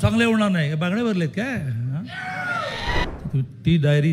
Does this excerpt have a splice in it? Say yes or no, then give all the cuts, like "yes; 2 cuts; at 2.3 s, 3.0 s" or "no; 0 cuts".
yes; 1 cut; at 3.1 s